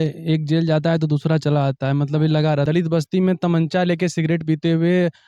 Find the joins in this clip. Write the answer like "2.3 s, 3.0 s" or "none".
2.7 s